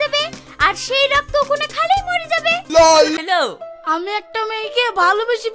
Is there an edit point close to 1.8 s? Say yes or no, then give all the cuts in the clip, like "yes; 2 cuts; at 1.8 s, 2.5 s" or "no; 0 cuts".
no; 1 cut; at 3.2 s